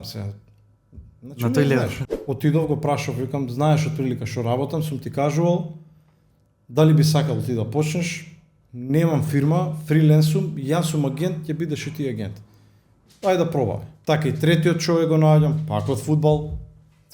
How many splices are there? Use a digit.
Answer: 2